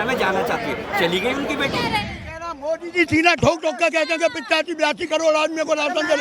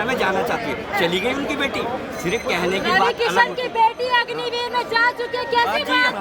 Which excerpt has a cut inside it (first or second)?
first